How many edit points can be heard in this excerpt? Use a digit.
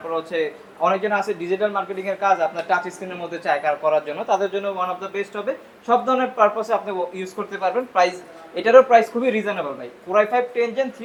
0